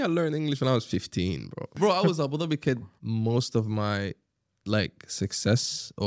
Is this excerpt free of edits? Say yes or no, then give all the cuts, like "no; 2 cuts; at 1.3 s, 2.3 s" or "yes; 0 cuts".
no; 2 cuts; at 1.8 s, 3.0 s